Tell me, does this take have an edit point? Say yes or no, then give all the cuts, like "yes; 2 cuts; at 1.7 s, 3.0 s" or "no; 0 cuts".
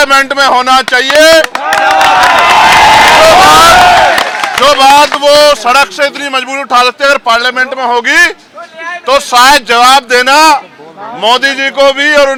no; 0 cuts